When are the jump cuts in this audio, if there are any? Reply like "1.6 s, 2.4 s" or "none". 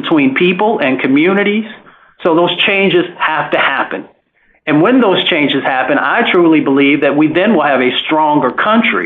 2.1 s